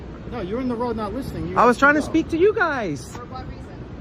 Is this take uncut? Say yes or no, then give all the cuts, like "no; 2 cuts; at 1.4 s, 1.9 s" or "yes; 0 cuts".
yes; 0 cuts